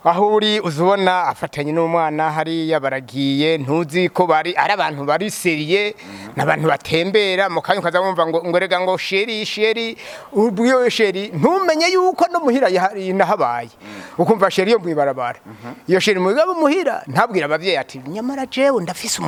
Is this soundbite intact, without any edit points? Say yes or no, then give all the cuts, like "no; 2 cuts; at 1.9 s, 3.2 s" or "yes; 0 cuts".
yes; 0 cuts